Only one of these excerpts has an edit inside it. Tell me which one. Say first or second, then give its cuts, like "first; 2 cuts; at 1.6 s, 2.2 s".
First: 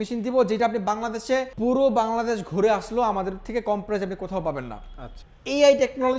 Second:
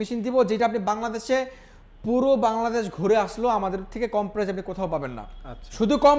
first; 2 cuts; at 1.5 s, 5.2 s